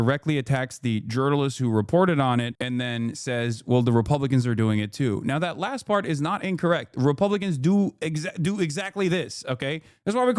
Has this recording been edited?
yes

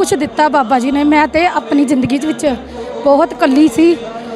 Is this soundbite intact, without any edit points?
yes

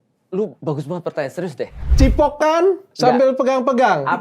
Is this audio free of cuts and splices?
no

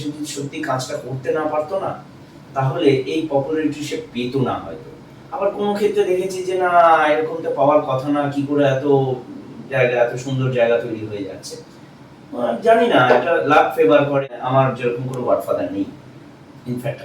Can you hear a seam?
yes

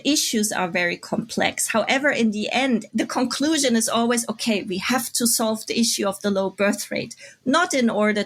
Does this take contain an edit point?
no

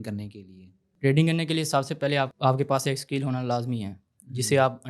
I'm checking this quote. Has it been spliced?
yes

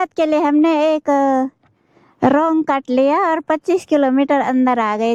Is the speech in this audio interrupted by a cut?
no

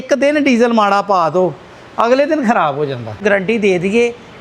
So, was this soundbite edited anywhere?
yes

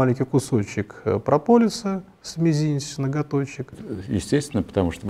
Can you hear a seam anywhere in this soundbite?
yes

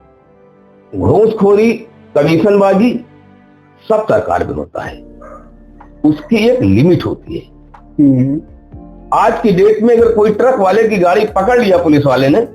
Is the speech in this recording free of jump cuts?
no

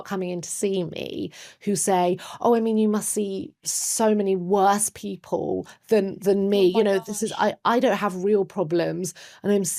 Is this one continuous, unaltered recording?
yes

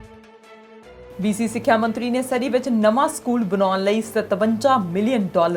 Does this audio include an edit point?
yes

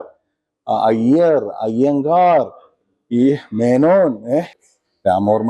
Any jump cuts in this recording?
yes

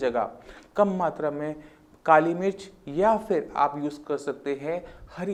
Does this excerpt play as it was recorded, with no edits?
yes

